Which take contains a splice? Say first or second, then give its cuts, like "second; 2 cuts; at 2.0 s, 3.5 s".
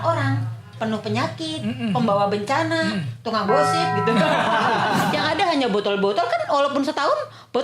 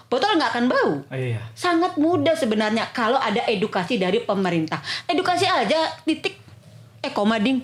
first; 1 cut; at 5.1 s